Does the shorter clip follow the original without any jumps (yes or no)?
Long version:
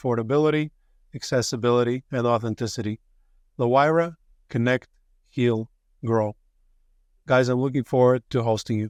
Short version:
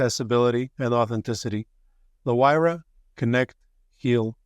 yes